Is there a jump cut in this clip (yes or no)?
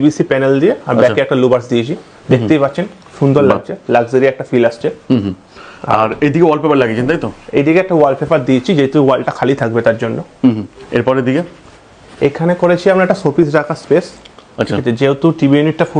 no